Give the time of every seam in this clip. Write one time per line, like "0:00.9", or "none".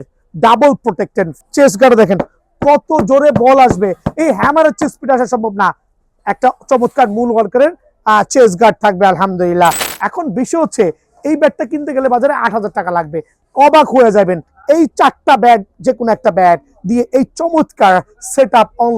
0:01.3
0:09.9
0:13.4
0:14.5